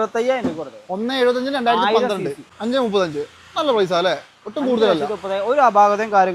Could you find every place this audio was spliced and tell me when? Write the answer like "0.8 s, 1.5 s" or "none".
2.4 s